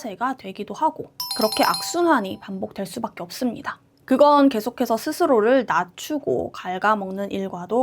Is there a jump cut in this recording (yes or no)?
no